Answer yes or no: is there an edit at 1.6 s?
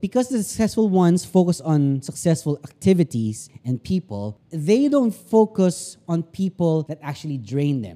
no